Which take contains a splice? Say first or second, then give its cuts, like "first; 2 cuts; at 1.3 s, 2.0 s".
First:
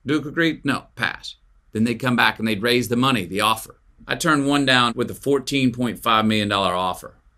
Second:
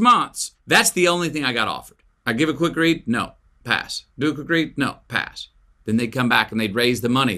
first; 1 cut; at 4.9 s